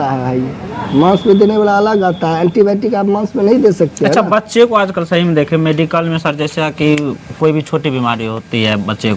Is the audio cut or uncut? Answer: uncut